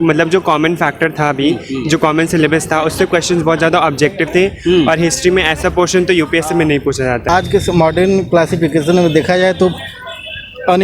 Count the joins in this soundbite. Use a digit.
1